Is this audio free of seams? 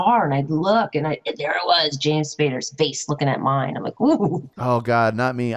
no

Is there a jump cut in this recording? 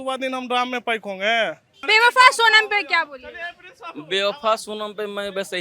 no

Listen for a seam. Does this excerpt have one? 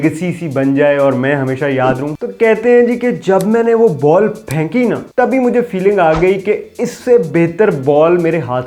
yes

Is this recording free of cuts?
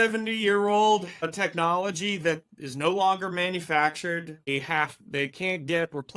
no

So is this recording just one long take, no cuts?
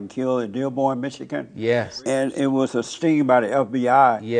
no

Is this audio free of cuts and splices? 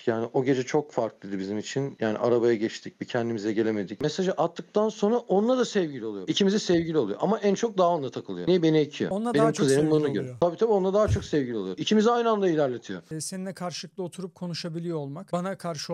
no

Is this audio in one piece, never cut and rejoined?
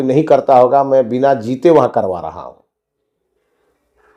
yes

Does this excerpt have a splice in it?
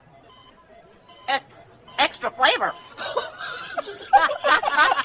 no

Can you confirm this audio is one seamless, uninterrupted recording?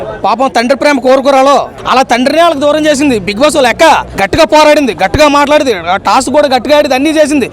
no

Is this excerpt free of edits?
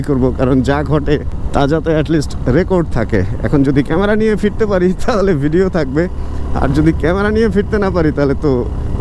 yes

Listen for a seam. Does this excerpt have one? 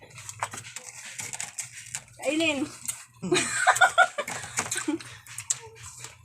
yes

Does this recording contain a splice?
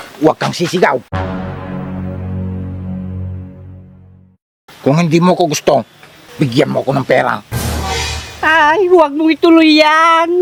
no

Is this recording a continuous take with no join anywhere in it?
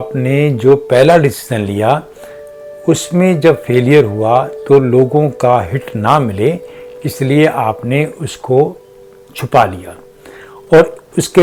yes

